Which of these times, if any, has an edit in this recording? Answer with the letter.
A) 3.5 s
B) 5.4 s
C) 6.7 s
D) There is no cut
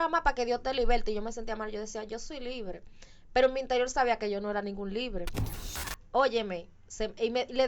B